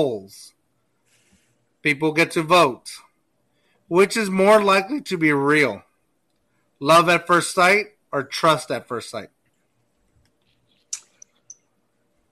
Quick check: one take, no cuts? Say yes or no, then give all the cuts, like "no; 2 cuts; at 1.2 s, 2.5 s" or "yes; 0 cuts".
yes; 0 cuts